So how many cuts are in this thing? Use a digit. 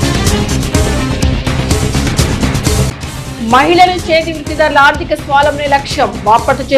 1